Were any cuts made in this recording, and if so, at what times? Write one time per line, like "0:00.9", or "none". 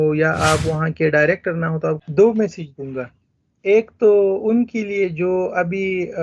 0:02.0